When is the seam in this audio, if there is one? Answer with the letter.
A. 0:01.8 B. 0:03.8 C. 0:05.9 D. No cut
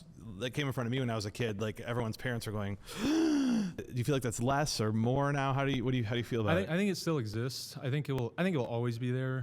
B